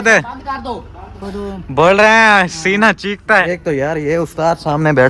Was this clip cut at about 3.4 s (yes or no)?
yes